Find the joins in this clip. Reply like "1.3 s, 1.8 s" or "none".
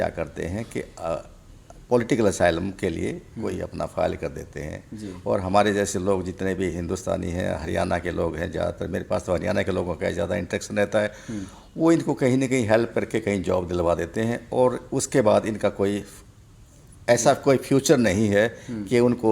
none